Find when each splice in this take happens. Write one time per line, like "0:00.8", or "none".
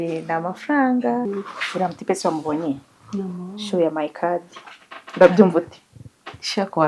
0:01.3